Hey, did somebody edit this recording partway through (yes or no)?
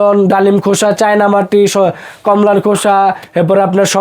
no